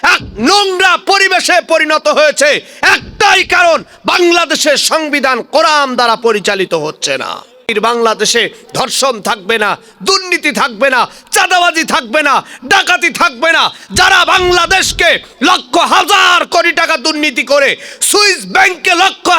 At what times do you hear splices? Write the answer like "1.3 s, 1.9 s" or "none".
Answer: 7.7 s